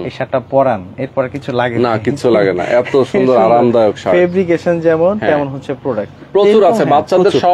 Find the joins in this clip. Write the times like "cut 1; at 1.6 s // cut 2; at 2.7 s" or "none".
none